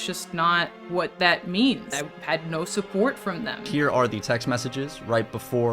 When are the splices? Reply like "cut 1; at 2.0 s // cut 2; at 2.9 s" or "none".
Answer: cut 1; at 1.9 s // cut 2; at 3.5 s